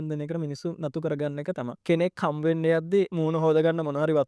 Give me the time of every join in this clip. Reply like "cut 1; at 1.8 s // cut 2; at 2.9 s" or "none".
cut 1; at 1.7 s // cut 2; at 3.1 s